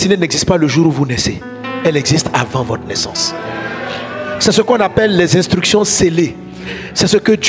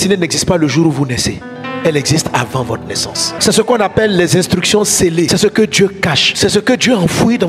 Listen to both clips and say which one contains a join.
second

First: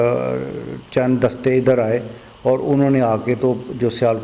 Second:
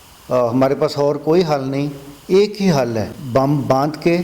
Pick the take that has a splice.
second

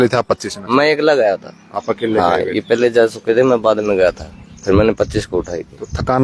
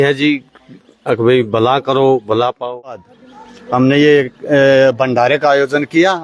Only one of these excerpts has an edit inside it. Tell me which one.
second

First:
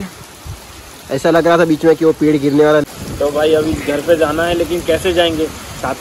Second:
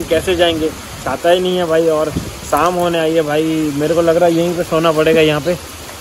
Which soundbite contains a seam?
first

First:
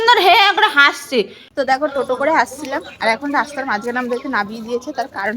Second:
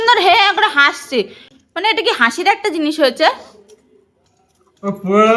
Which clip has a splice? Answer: first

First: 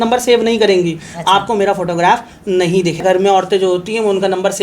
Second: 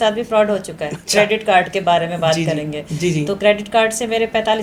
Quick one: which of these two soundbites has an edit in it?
first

